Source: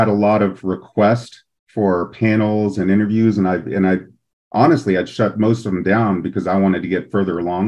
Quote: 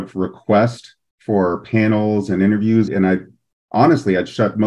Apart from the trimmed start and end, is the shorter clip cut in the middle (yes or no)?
yes